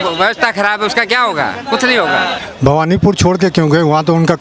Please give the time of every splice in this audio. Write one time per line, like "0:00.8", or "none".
0:02.4